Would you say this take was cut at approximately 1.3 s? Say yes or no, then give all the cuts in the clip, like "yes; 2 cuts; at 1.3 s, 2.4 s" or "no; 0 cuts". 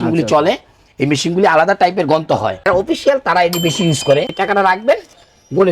no; 2 cuts; at 2.7 s, 4.3 s